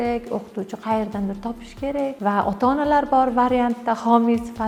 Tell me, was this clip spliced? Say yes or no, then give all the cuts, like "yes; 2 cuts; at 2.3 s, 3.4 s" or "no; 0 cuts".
no; 0 cuts